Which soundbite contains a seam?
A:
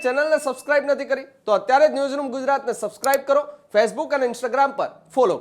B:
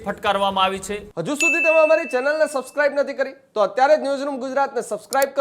B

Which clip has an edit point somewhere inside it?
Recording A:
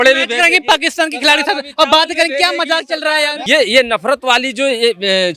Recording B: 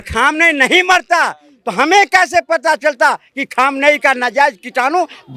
A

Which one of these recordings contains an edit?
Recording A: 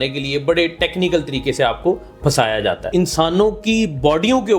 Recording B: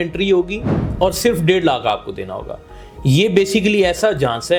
A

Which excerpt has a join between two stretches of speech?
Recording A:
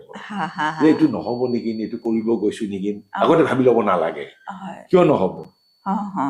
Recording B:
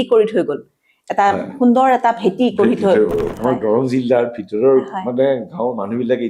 B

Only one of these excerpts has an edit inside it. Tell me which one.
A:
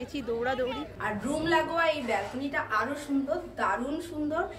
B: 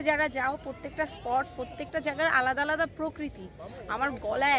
A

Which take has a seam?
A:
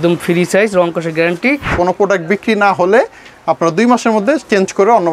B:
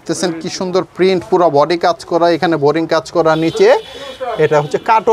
A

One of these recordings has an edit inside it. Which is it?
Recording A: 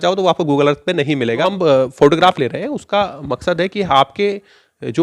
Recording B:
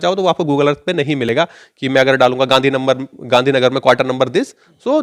A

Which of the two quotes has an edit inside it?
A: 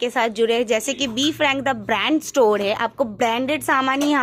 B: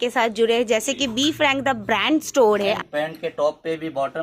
B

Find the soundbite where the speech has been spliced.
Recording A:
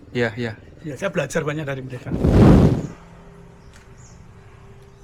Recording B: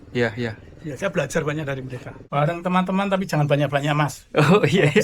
B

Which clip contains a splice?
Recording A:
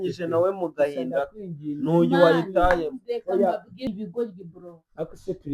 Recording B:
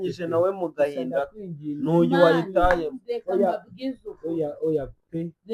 A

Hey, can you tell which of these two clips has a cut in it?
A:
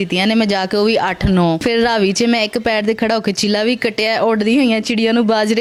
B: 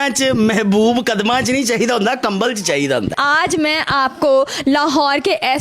B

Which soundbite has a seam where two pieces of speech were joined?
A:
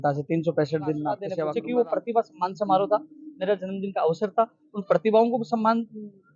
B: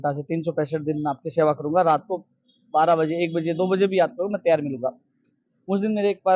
A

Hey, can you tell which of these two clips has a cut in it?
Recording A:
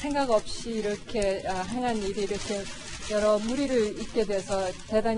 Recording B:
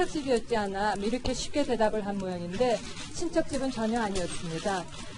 B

